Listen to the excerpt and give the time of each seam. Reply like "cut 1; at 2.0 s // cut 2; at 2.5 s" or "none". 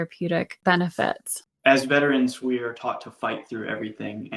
cut 1; at 1.0 s